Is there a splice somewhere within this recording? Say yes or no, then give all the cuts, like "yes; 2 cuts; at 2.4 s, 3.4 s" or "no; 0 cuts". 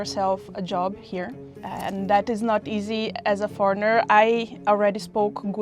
yes; 1 cut; at 1.5 s